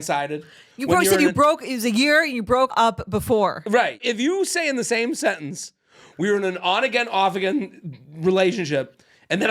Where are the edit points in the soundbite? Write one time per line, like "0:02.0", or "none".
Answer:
0:02.7
0:04.0